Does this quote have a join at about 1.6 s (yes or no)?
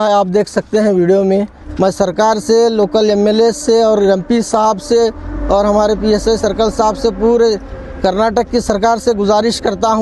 yes